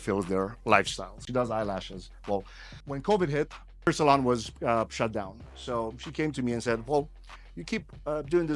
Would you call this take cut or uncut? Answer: cut